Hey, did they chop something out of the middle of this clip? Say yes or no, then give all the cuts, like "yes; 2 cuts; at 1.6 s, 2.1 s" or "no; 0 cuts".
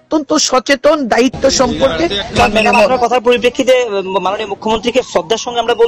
yes; 1 cut; at 2.4 s